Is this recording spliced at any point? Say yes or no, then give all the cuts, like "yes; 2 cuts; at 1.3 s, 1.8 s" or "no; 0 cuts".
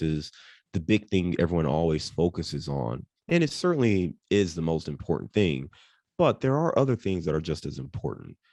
no; 0 cuts